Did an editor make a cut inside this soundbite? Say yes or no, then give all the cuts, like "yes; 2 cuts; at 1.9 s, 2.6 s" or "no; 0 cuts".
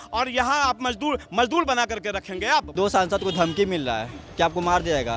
yes; 1 cut; at 2.7 s